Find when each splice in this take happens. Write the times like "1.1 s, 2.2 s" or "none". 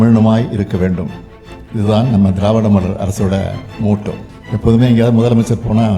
4.3 s